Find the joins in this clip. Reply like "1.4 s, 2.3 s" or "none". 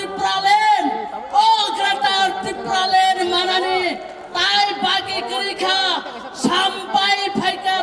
none